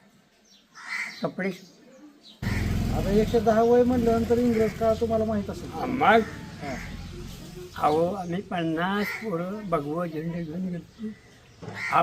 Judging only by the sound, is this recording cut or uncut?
cut